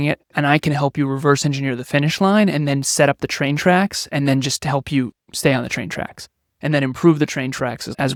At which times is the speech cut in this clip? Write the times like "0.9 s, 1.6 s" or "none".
none